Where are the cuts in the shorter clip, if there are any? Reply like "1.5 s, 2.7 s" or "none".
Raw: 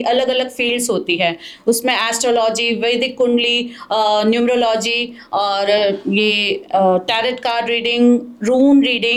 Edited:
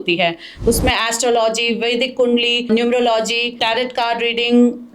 2.7 s, 3.6 s